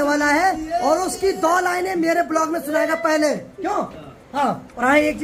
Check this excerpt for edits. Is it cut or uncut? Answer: uncut